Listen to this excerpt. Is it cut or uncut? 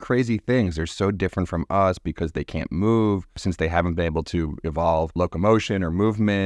cut